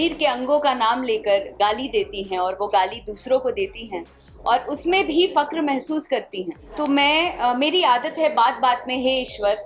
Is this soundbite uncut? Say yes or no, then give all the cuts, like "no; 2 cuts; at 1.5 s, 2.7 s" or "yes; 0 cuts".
no; 1 cut; at 6.7 s